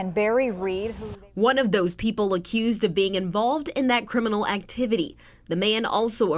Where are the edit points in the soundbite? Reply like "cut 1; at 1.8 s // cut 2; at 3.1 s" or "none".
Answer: cut 1; at 0.9 s